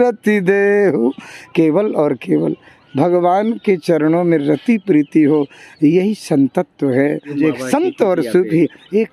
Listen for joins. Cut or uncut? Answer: cut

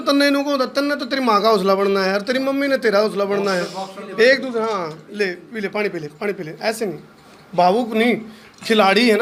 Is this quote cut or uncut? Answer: uncut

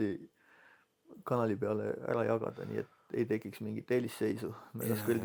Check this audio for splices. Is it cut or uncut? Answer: uncut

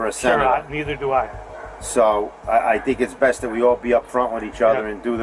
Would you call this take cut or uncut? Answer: uncut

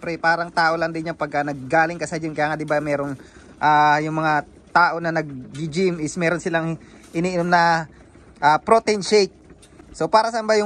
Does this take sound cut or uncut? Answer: uncut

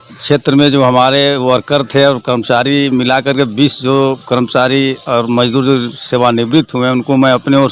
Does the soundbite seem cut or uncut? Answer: uncut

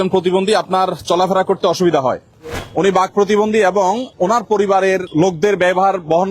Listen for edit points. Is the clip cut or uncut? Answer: cut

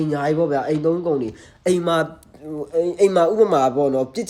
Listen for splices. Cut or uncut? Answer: uncut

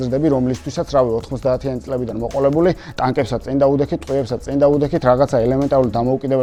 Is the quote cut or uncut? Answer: uncut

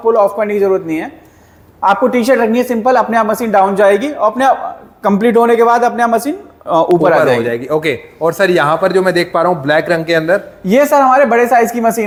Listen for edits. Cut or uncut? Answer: uncut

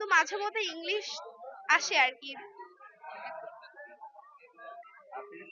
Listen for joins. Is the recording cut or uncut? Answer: uncut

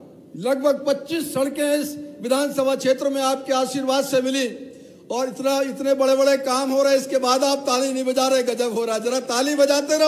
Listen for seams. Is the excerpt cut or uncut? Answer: uncut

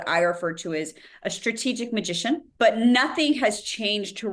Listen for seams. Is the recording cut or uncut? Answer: cut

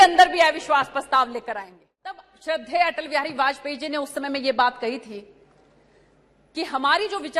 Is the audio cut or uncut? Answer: cut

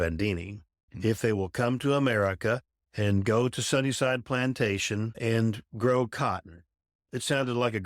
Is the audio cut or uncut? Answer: cut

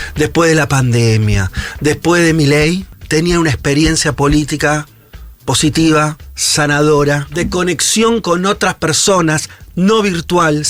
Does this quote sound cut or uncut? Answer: cut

